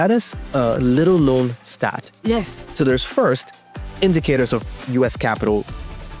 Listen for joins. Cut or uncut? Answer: cut